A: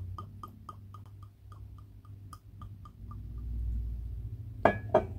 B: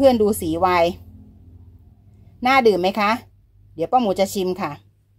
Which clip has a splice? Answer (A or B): A